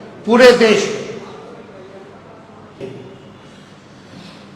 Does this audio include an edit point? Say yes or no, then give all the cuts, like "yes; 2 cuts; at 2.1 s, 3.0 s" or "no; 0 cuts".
yes; 1 cut; at 2.8 s